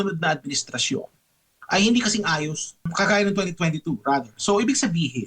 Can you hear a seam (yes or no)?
yes